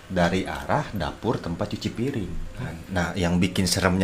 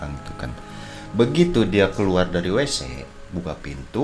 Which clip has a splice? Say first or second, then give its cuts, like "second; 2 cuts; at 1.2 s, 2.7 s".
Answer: first; 1 cut; at 2.6 s